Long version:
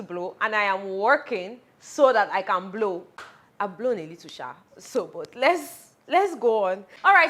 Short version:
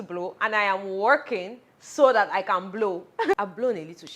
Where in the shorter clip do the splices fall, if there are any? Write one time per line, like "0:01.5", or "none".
0:03.2